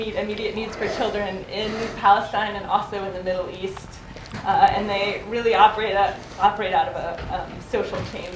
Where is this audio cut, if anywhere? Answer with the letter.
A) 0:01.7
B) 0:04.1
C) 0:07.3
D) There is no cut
A